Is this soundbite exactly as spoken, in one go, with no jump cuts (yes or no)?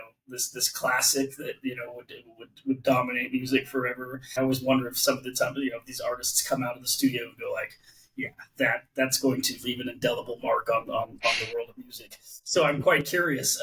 no